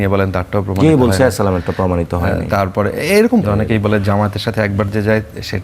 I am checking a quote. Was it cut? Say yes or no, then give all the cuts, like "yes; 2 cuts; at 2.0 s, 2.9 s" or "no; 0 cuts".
yes; 1 cut; at 3.4 s